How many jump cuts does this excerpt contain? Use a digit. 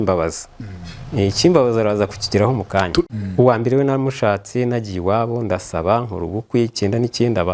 1